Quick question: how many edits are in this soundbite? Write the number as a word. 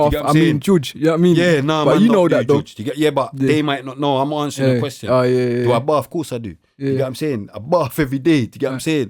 zero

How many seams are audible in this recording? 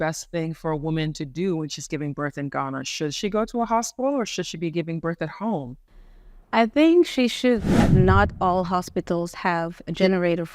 one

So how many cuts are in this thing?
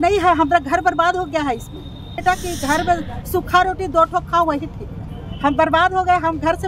one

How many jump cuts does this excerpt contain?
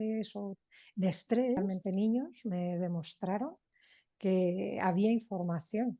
one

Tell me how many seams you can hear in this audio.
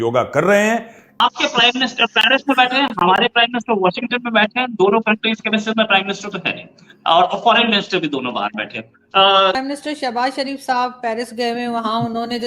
two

